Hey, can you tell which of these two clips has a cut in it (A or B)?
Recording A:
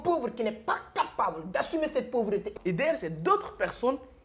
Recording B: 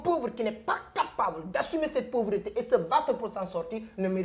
A